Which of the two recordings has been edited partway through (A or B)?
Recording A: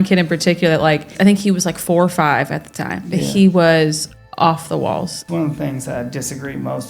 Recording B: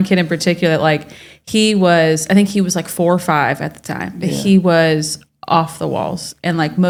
A